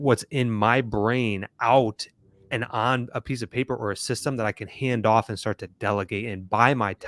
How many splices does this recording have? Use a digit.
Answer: 0